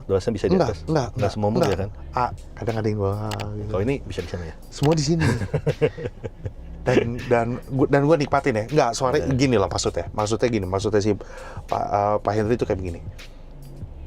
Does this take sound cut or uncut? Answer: uncut